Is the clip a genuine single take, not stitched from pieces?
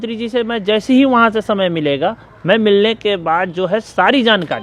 yes; 0 cuts

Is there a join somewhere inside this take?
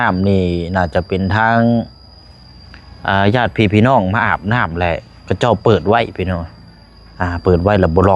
no; 0 cuts

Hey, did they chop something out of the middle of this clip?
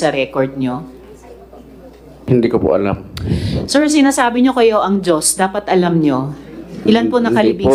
no; 0 cuts

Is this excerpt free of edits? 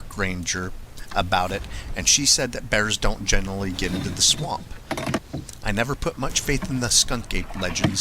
no; 1 cut; at 5.3 s

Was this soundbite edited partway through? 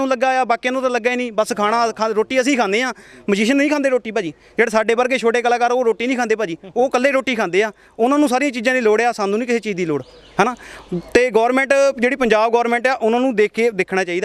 no; 0 cuts

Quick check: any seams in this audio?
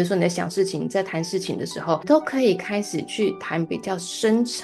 no; 0 cuts

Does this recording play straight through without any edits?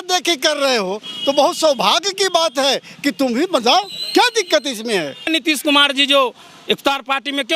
no; 1 cut; at 5.2 s

